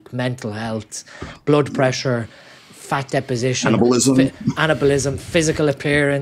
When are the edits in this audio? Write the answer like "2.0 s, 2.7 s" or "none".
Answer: none